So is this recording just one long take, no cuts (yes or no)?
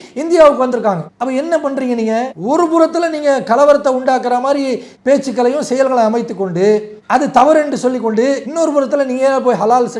no